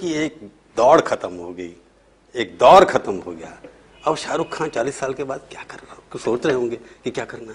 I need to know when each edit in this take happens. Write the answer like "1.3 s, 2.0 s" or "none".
none